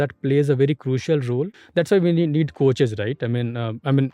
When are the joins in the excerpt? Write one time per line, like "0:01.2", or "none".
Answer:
0:01.6